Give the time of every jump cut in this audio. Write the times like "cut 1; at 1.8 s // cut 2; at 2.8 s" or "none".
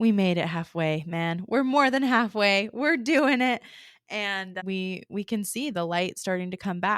cut 1; at 4.5 s